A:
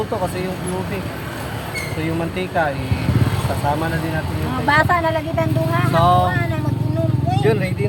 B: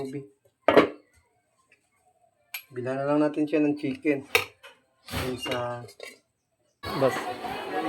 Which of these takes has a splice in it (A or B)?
B